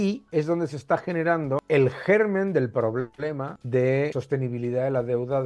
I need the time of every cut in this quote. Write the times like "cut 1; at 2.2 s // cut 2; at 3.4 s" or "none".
cut 1; at 1.6 s // cut 2; at 3.5 s // cut 3; at 4.2 s